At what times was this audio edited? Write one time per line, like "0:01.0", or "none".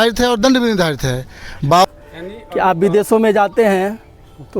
0:01.9